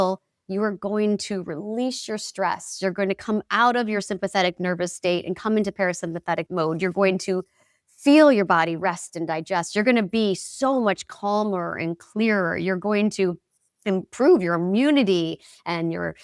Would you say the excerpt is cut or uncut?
uncut